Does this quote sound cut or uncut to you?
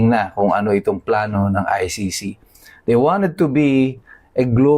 uncut